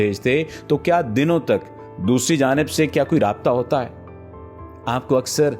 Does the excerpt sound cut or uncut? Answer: uncut